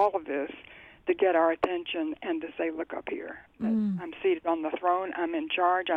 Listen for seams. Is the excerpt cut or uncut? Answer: uncut